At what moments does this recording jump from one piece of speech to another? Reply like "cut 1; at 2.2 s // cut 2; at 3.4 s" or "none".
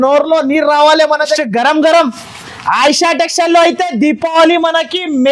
cut 1; at 1.4 s